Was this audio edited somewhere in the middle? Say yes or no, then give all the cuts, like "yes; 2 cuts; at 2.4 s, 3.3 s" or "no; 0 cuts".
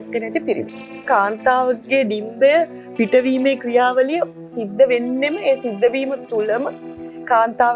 yes; 1 cut; at 1.1 s